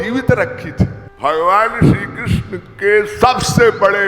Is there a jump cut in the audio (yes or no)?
yes